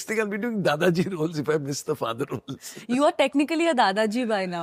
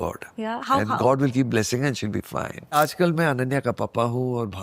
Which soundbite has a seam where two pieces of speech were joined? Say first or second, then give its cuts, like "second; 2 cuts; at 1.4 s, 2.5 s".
second; 1 cut; at 2.7 s